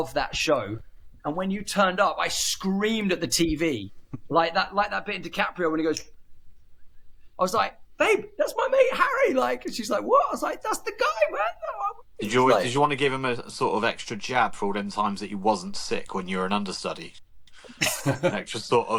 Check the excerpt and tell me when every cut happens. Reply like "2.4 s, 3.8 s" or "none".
none